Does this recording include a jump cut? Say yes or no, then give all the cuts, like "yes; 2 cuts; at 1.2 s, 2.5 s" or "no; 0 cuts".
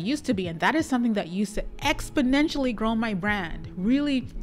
no; 0 cuts